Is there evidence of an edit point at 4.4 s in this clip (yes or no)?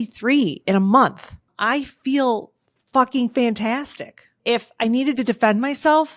yes